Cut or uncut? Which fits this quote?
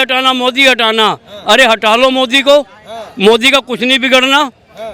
uncut